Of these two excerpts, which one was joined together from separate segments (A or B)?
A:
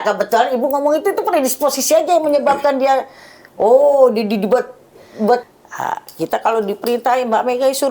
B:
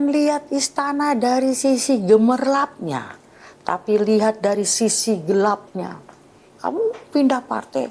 A